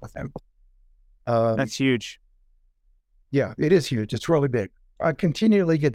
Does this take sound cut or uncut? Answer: cut